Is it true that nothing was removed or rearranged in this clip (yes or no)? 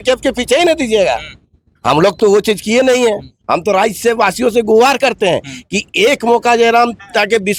yes